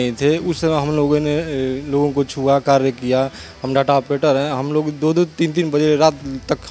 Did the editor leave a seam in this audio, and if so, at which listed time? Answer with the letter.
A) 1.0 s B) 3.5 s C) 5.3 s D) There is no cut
D